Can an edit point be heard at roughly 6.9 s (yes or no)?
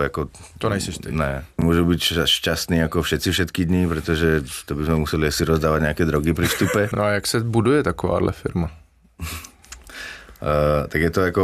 yes